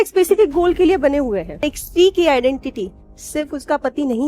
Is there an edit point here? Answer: yes; 1 cut; at 1.6 s

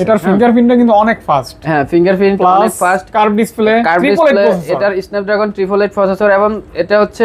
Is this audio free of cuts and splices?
yes; 0 cuts

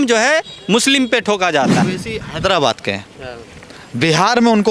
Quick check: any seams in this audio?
yes; 1 cut; at 1.9 s

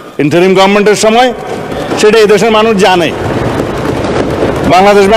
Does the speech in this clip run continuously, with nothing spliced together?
yes; 0 cuts

